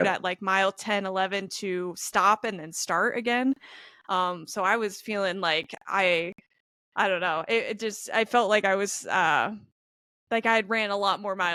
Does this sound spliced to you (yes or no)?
no